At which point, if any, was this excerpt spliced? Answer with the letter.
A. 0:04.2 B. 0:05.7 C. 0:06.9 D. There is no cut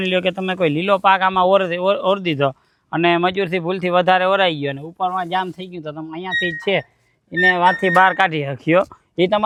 D